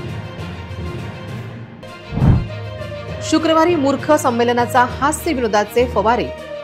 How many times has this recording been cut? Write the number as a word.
zero